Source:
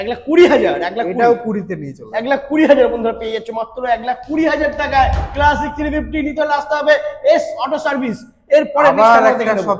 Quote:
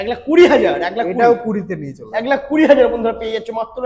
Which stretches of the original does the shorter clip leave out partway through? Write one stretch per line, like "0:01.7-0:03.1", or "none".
none